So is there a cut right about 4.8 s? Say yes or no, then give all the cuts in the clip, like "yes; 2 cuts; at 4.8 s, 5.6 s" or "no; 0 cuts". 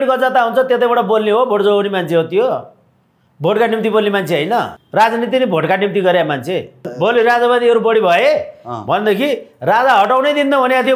yes; 2 cuts; at 4.8 s, 6.9 s